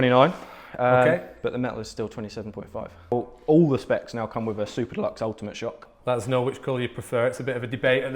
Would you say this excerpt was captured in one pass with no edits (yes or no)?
no